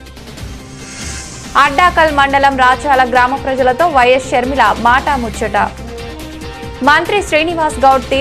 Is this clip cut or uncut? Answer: cut